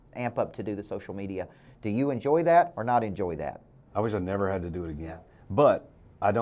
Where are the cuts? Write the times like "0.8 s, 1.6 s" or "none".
5.2 s

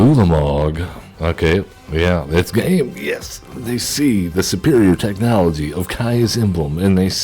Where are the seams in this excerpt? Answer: 1.0 s

